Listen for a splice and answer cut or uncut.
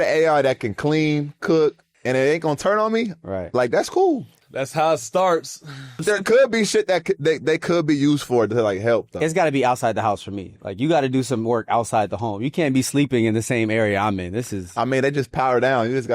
cut